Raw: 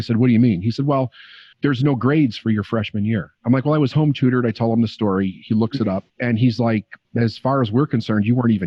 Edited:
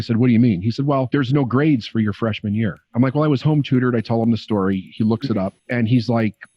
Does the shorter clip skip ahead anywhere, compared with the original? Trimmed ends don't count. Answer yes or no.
yes